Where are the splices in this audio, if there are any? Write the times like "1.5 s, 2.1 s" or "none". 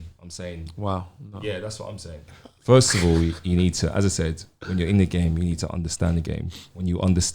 2.3 s